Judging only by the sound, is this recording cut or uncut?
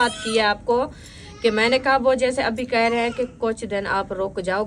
uncut